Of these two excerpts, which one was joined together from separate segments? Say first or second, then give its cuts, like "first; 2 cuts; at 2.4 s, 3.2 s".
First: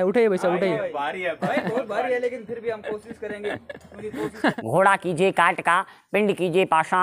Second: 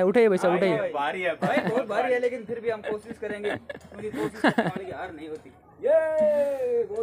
first; 1 cut; at 4.6 s